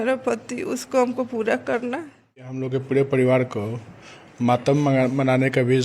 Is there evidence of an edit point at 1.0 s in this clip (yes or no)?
no